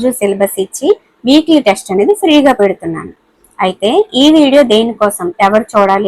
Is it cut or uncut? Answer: uncut